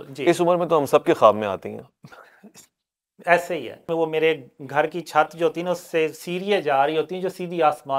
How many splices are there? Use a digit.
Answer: 1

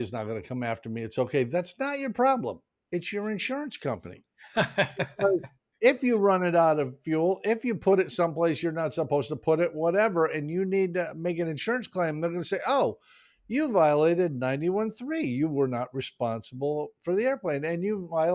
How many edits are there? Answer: 0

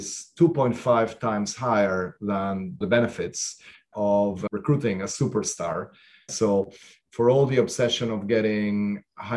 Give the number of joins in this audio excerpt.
3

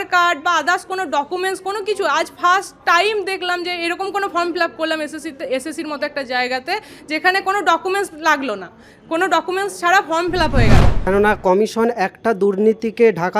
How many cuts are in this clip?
1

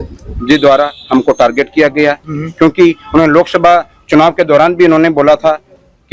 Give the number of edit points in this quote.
0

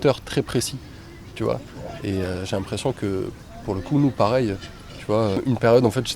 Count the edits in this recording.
0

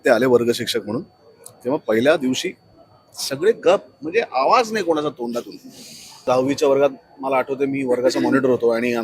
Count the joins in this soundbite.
1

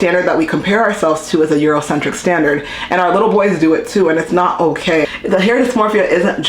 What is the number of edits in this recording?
1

